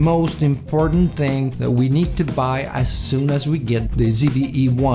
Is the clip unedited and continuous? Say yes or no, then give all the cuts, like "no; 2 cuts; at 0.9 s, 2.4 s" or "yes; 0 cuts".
no; 2 cuts; at 1.5 s, 3.9 s